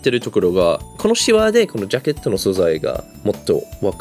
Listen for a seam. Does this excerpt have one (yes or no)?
yes